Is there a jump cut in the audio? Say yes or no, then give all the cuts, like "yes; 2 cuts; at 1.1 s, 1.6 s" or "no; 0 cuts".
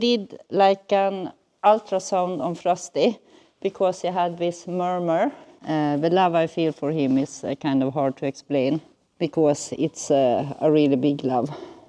yes; 2 cuts; at 5.5 s, 9.0 s